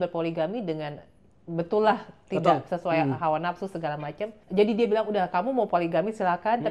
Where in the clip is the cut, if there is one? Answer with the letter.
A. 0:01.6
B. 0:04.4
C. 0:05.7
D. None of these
B